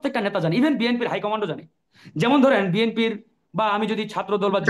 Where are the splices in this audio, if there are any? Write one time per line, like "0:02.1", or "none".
none